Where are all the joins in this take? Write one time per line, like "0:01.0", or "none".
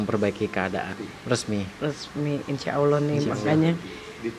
0:00.9